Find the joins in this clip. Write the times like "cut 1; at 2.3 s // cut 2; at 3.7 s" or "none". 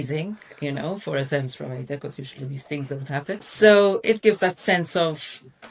none